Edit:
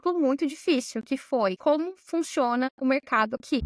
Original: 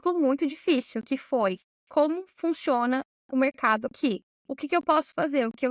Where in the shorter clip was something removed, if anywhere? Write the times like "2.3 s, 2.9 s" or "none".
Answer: 1.6 s, 2.7 s

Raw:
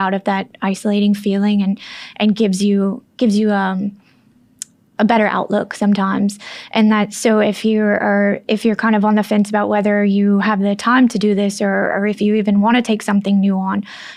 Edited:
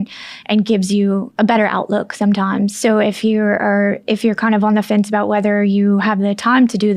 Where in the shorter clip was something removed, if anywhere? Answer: 1.3 s, 2.8 s

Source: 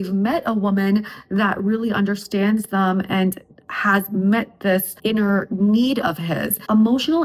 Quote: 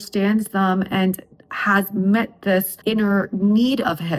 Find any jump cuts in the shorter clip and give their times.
none

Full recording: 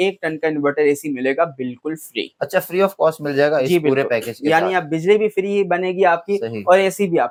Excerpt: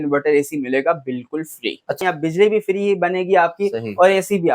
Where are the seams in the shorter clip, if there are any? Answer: 2.0 s

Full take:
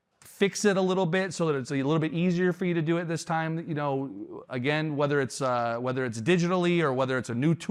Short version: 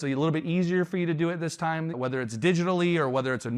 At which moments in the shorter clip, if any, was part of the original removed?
2.0 s

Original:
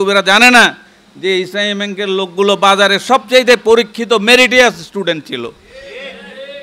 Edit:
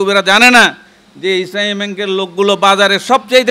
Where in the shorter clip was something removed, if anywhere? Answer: none

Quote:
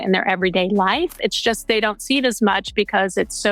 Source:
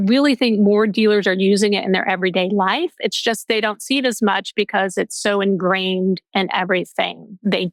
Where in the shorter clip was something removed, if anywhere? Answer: none

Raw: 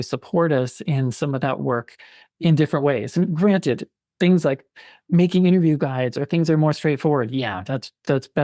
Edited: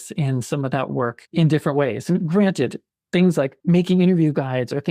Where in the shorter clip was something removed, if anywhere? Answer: 1.2 s, 3.6 s

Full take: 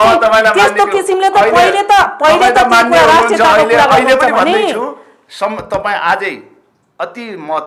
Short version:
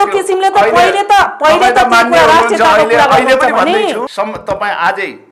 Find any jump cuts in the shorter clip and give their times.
4.1 s

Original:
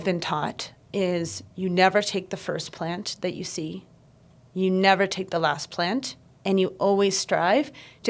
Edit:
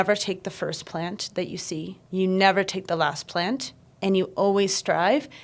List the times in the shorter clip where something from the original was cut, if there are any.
2.0 s

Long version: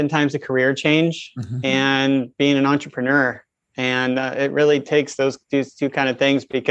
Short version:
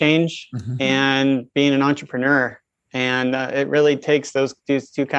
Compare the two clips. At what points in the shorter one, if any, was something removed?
none

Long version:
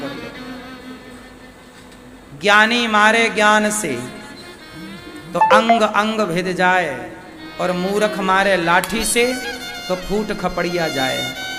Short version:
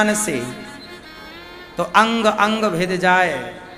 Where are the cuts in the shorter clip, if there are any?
none

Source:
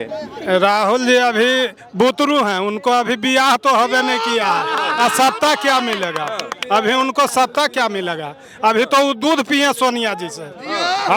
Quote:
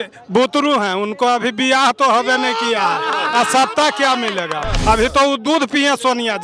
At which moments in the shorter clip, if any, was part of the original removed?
4.7 s

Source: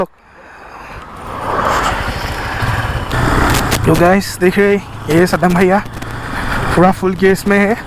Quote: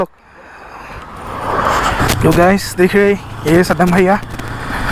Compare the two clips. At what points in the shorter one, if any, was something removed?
2.0 s

